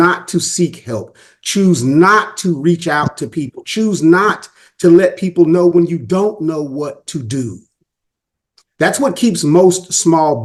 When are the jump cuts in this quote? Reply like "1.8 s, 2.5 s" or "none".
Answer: none